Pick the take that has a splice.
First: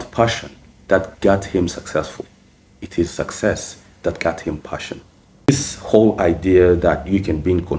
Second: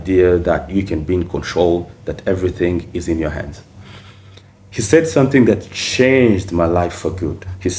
first; 1 cut; at 5.5 s

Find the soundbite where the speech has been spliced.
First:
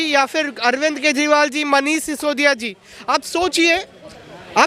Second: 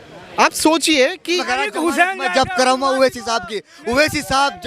second; 1 cut; at 1.5 s

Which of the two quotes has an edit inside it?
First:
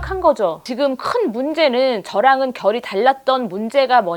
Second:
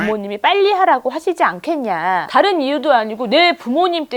second; 1 cut; at 2.3 s

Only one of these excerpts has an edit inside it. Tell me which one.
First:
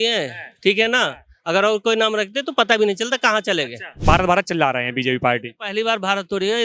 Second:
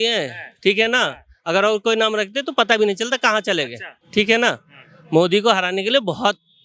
first; 1 cut; at 3.9 s

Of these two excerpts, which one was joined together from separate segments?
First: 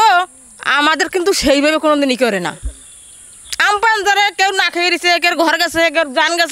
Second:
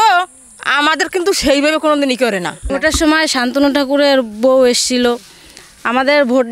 second; 1 cut; at 2.6 s

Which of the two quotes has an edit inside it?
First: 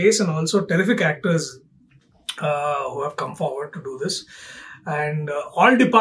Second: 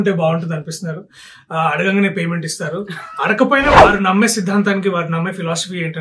second; 1 cut; at 3.7 s

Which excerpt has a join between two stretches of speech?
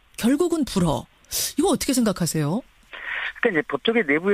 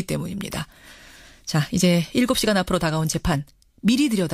first; 1 cut; at 2.7 s

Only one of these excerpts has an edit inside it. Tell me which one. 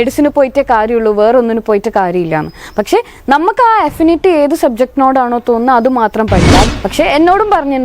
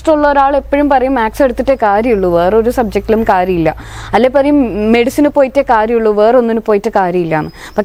first; 1 cut; at 6.7 s

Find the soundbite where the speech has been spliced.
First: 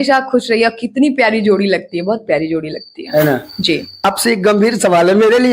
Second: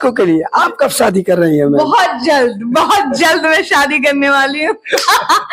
first; 1 cut; at 4.0 s

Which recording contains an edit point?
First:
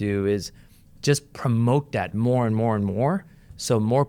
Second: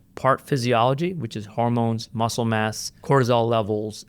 second; 1 cut; at 2.9 s

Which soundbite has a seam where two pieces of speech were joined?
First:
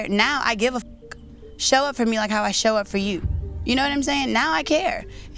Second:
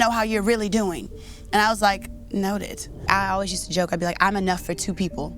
second; 1 cut; at 3.0 s

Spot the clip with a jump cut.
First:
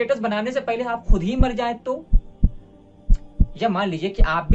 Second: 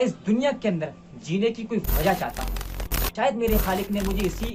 second; 1 cut; at 3.0 s

